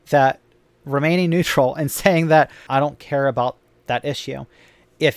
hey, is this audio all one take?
no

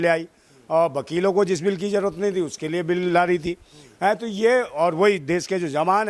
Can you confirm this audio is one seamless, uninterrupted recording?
yes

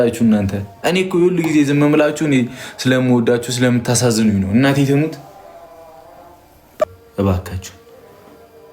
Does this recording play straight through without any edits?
no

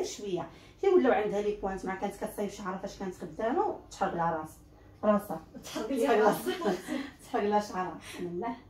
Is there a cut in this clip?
no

